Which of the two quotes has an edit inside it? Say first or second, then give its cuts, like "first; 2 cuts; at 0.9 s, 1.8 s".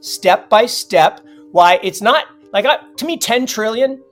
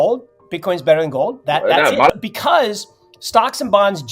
second; 1 cut; at 2.1 s